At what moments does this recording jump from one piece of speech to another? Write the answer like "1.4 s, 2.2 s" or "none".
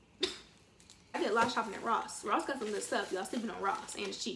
1.2 s